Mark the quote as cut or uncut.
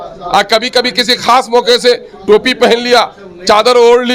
uncut